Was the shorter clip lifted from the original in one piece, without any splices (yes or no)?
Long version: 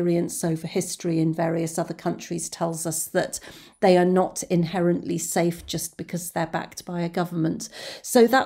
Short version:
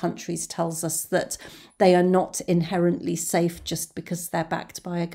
yes